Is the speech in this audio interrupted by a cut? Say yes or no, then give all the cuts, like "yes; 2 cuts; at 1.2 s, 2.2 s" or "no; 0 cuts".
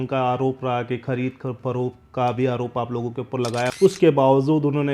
yes; 1 cut; at 3.7 s